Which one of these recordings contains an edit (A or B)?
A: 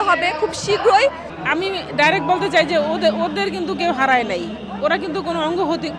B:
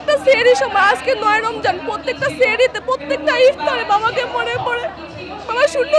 A